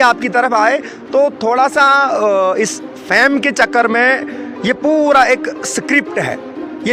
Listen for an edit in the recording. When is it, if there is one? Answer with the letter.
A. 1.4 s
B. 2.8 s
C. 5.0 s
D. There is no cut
D